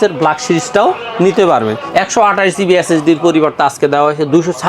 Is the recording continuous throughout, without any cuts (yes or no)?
no